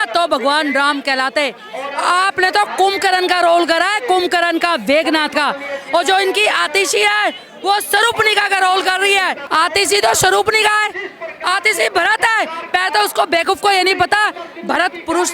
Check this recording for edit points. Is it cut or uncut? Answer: cut